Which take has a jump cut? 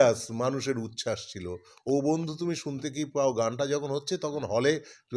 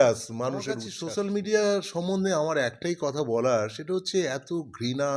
second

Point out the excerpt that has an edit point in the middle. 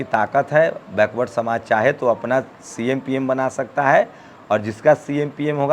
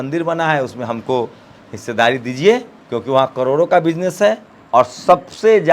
second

